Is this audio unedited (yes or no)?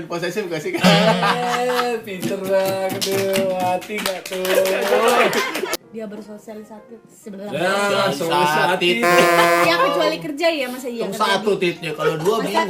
no